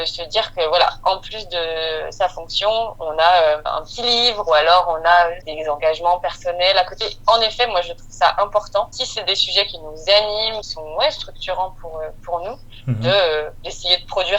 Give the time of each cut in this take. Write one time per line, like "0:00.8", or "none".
0:03.7
0:05.5
0:09.0
0:10.7